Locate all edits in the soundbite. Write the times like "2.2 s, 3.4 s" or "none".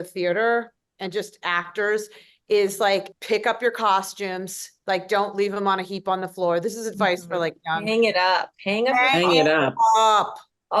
3.1 s

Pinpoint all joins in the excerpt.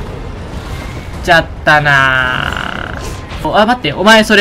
3.5 s

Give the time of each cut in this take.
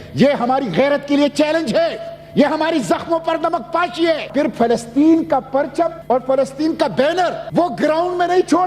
4.3 s, 6.0 s, 7.4 s

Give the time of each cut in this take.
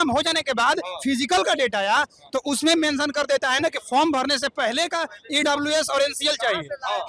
none

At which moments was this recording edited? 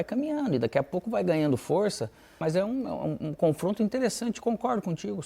2.4 s

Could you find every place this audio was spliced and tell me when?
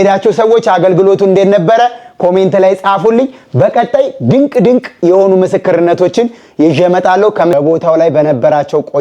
7.5 s

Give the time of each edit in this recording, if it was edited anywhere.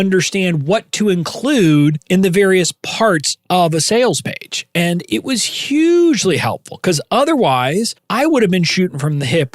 2.0 s, 8.0 s

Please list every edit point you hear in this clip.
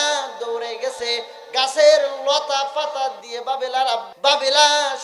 4.1 s

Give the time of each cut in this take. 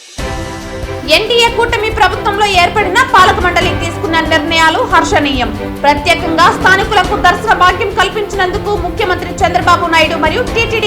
0.9 s

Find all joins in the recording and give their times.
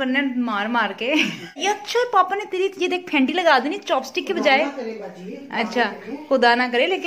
1.6 s

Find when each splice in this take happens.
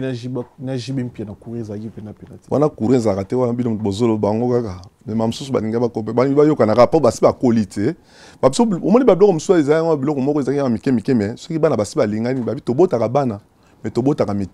none

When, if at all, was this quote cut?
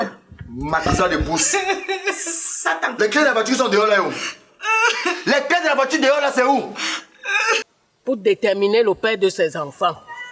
7.6 s

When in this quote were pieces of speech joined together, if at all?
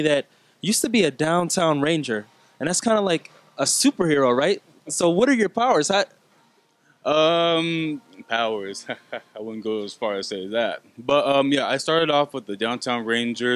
none

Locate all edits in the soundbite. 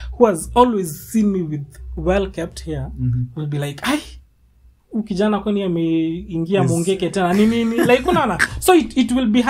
none

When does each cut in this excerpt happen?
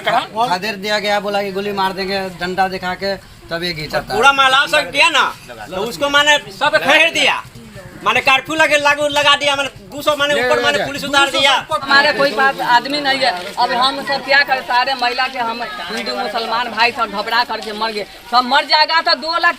11.9 s

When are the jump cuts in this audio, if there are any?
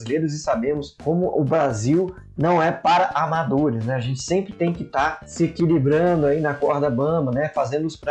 0.9 s, 5.2 s

